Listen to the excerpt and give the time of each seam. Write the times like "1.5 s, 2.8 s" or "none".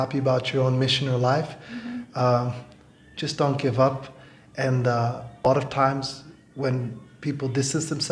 5.5 s